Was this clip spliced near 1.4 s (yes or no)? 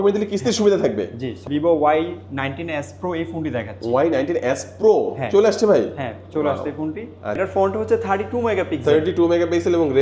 yes